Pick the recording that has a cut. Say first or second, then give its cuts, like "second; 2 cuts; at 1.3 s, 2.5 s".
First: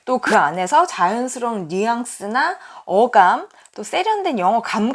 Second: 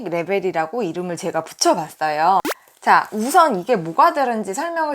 second; 1 cut; at 2.4 s